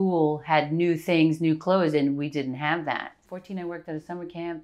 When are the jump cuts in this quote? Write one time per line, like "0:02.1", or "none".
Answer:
0:03.3